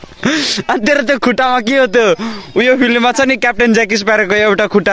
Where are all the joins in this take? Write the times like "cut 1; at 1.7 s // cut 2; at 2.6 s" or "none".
none